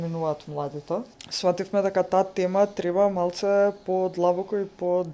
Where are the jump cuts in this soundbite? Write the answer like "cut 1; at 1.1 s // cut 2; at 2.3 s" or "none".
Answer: cut 1; at 1.2 s